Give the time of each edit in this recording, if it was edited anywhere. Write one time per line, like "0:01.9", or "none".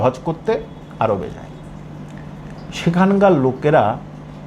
none